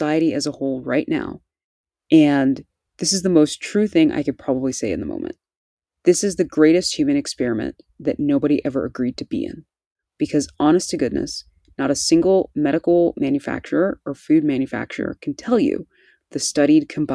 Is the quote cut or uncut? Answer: uncut